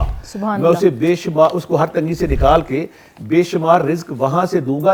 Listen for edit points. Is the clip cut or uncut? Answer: uncut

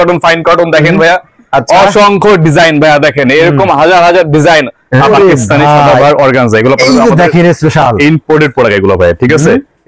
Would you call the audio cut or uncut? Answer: cut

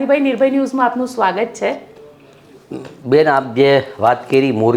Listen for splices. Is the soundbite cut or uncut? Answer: uncut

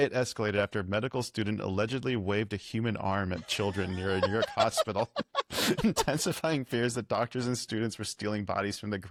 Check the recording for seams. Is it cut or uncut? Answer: uncut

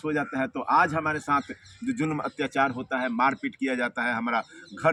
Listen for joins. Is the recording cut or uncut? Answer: uncut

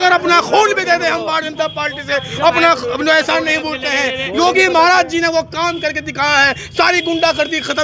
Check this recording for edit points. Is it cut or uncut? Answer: uncut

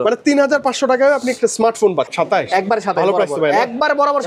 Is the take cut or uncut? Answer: cut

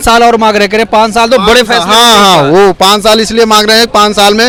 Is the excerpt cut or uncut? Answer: uncut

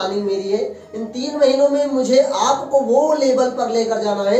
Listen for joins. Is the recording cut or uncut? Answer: uncut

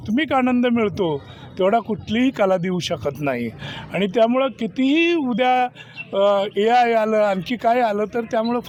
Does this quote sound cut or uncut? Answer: uncut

